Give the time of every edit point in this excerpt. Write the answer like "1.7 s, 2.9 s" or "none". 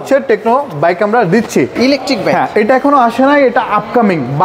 none